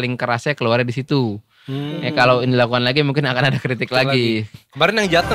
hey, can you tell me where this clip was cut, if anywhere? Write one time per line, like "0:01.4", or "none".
none